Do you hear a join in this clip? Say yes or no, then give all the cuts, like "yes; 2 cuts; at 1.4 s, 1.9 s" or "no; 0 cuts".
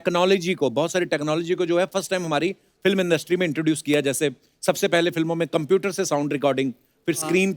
no; 0 cuts